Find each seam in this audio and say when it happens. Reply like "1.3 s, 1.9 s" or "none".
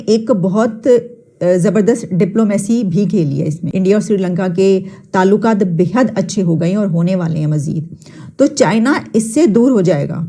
none